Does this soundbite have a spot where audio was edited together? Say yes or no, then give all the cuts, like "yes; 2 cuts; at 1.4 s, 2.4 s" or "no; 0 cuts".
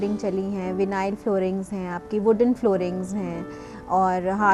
no; 0 cuts